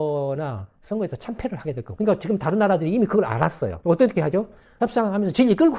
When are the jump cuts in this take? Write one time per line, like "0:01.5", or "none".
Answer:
0:04.8